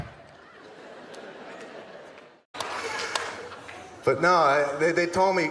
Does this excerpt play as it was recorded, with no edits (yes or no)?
no